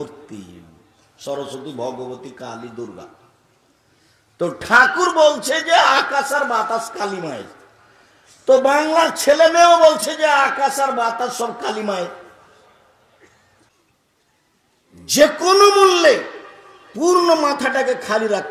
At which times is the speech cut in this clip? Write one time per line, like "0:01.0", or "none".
0:13.7